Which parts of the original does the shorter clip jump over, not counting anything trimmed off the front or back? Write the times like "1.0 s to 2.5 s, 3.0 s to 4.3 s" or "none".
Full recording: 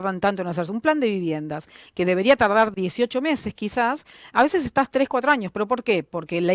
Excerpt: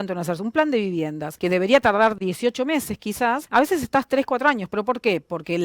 1.5 s to 1.8 s, 4.0 s to 4.3 s

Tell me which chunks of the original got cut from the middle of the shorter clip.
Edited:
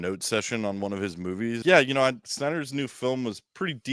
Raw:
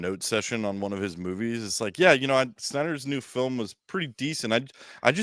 1.6 s to 1.9 s

